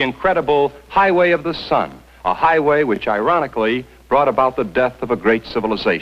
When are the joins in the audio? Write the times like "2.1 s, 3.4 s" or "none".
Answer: none